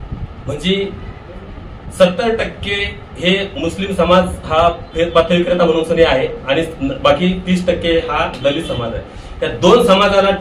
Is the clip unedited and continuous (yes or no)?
yes